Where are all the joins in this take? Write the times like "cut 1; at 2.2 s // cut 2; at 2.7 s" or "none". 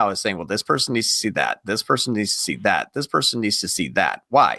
none